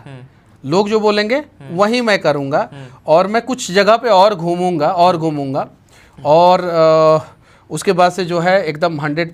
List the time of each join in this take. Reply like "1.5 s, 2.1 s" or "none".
none